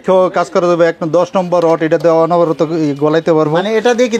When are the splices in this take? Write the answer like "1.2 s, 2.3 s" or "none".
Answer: none